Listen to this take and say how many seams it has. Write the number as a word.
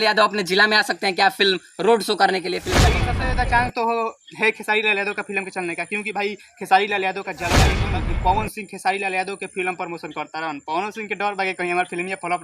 two